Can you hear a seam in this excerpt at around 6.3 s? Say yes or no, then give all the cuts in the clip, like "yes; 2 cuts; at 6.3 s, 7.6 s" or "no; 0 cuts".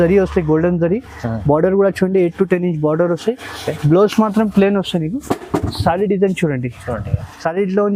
no; 0 cuts